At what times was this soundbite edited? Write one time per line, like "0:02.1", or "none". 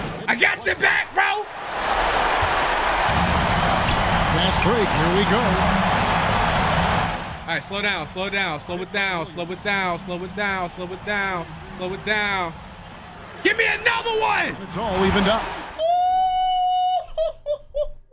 none